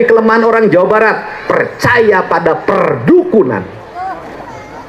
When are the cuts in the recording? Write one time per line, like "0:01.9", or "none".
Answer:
none